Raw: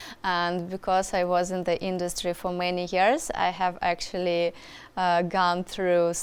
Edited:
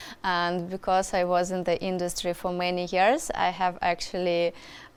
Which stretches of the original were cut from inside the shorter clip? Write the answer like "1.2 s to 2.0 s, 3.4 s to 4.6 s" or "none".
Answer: none